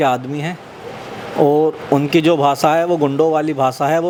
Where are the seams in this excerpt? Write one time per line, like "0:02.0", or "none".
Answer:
none